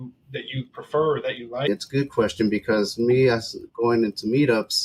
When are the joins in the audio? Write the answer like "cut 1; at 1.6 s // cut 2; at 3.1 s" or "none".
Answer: cut 1; at 1.7 s